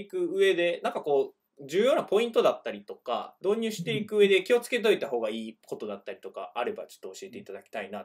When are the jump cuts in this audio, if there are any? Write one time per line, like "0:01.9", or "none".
none